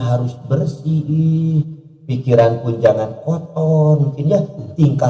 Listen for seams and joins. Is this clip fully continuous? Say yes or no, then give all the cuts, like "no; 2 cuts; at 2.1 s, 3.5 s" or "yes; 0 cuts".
yes; 0 cuts